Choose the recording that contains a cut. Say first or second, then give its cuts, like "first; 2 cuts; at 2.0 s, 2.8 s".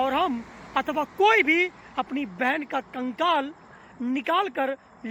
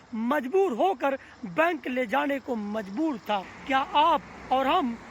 second; 1 cut; at 3.5 s